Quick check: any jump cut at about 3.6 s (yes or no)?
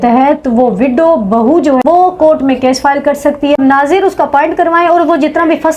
yes